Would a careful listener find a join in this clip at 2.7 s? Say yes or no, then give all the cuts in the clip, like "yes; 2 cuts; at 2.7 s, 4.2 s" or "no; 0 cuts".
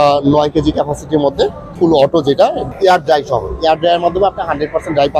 yes; 2 cuts; at 1.7 s, 2.7 s